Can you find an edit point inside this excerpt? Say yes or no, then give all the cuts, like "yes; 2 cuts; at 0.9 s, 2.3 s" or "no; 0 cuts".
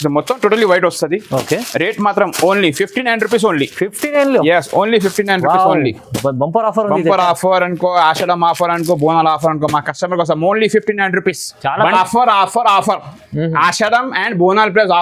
yes; 1 cut; at 11.6 s